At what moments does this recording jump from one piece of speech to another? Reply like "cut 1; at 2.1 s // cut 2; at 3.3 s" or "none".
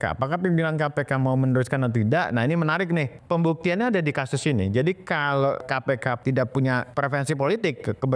cut 1; at 3.1 s // cut 2; at 5.7 s // cut 3; at 6.9 s